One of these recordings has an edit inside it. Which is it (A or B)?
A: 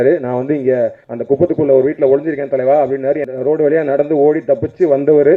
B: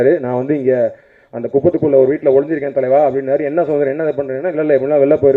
A